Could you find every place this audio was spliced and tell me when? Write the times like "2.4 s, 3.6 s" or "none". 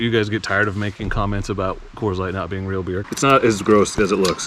3.1 s